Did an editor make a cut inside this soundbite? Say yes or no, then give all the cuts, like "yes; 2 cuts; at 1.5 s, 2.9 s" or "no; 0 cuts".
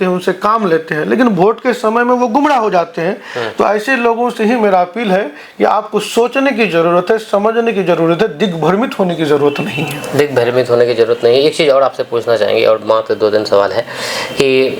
no; 0 cuts